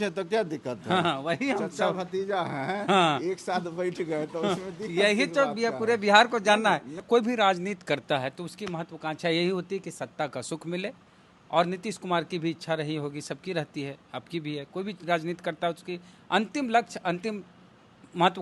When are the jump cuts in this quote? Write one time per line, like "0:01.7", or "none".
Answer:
0:07.0